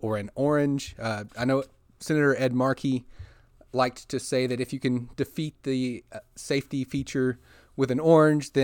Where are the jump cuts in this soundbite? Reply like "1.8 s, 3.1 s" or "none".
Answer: none